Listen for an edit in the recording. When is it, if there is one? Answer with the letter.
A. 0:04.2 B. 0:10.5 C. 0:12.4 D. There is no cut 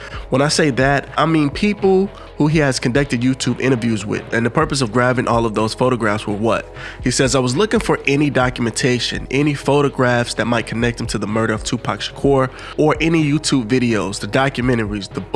A